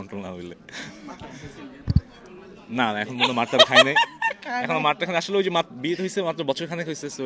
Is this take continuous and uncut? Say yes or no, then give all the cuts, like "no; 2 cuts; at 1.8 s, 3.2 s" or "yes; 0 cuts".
yes; 0 cuts